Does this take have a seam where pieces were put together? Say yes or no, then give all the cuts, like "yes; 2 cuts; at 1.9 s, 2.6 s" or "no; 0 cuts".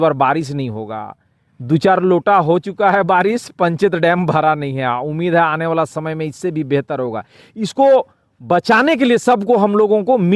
no; 0 cuts